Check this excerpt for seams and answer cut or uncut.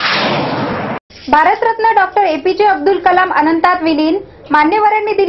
cut